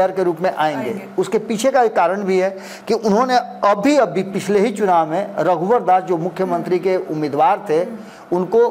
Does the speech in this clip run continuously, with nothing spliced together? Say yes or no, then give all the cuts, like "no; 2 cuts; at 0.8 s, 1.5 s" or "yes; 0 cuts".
yes; 0 cuts